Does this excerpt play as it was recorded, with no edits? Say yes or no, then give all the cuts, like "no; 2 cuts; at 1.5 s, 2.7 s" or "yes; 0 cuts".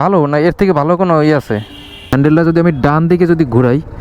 no; 1 cut; at 2.1 s